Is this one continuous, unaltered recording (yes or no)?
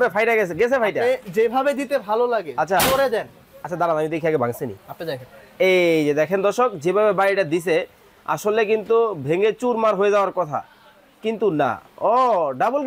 yes